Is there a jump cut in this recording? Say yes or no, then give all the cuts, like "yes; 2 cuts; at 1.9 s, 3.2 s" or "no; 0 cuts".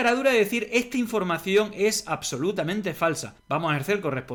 no; 0 cuts